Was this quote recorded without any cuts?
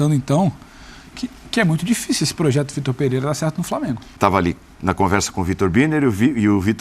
no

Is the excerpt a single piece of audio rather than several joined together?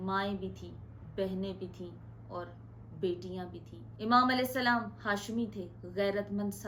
yes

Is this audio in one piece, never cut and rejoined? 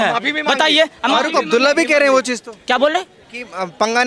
yes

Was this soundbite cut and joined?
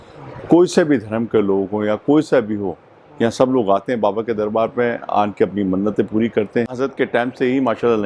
yes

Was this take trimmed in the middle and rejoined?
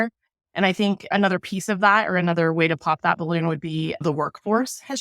yes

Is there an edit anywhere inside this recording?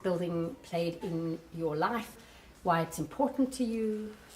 yes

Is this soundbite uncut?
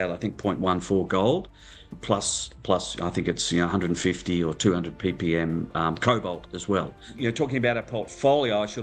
no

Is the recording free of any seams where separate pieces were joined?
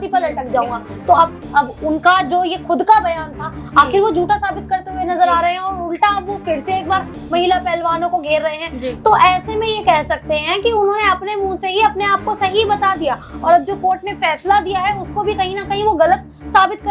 yes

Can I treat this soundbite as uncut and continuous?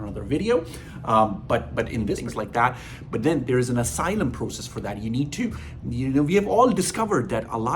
no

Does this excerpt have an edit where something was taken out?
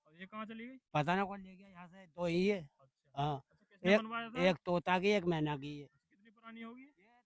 no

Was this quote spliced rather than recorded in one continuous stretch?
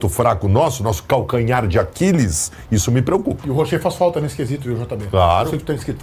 no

